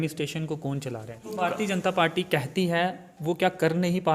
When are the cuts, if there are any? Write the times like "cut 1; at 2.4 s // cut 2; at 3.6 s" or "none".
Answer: cut 1; at 1.3 s